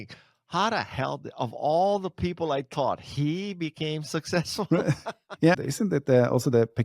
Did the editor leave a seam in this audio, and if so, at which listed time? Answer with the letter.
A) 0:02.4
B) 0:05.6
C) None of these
B